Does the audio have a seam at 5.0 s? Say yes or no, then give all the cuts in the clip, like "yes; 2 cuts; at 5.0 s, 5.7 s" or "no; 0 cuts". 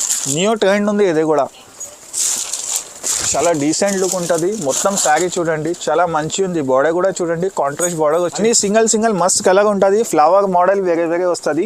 no; 1 cut; at 8.4 s